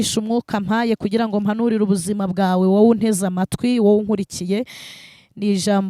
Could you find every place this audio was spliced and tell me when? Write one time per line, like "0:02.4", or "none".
none